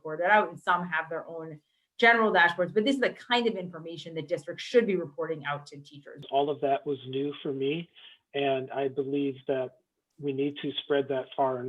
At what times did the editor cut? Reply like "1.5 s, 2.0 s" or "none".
6.2 s